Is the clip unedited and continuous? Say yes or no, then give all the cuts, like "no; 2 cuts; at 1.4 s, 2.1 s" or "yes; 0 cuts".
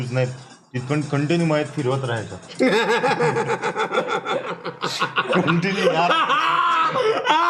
yes; 0 cuts